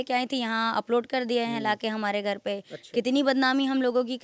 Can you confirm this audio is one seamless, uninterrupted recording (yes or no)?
yes